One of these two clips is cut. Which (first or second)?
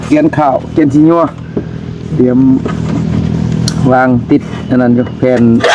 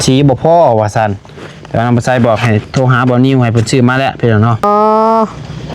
second